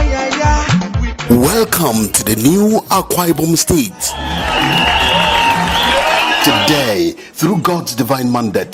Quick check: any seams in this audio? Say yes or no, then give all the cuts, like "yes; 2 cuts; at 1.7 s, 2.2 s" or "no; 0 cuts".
no; 0 cuts